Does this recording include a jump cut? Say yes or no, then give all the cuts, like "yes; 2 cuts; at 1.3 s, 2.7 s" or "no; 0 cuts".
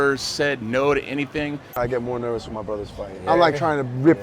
yes; 2 cuts; at 1.8 s, 3.3 s